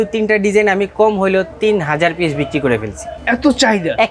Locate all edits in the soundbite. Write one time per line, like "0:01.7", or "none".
none